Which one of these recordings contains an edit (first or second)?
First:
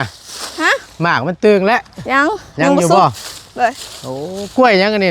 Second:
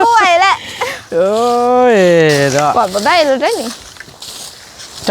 second